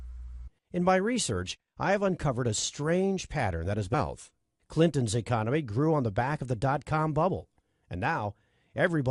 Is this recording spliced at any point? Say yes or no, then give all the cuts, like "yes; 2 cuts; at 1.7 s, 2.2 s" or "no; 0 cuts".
no; 0 cuts